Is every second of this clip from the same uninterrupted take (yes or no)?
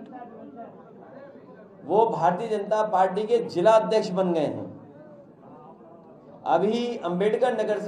yes